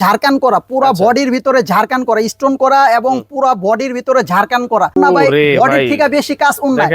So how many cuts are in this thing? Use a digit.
1